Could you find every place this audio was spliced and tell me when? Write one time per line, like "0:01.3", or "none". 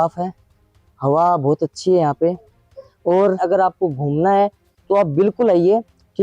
0:03.4